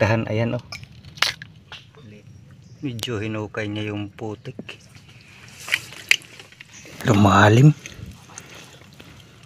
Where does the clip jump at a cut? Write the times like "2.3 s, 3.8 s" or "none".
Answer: 1.8 s, 6.6 s